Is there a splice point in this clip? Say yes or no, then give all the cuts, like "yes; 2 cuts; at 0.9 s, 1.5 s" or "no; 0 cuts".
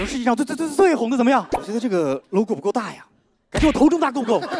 yes; 1 cut; at 1.7 s